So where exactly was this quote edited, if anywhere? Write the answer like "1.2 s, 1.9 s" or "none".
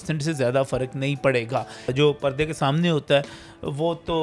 1.9 s